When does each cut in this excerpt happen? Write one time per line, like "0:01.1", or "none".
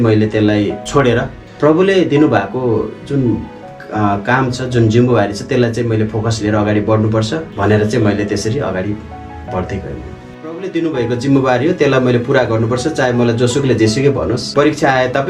0:10.6